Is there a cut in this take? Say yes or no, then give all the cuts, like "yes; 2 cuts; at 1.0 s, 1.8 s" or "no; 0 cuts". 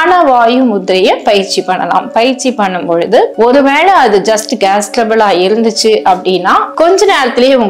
no; 0 cuts